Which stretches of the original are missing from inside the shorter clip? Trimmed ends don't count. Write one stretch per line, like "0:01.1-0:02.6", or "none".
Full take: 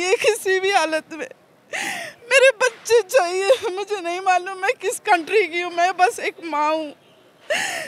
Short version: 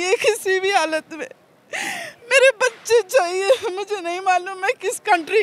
none